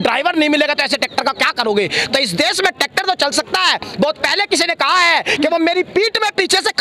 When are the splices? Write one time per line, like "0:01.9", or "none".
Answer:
none